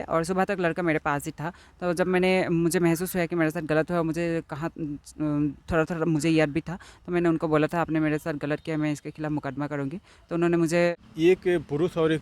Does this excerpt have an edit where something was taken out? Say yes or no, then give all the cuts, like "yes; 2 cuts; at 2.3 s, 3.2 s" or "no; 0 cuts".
yes; 1 cut; at 10.9 s